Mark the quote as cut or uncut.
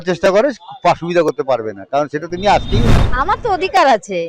cut